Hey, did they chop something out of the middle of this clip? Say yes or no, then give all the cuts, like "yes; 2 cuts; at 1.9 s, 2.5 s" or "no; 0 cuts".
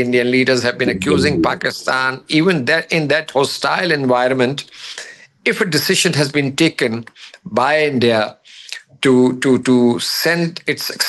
no; 0 cuts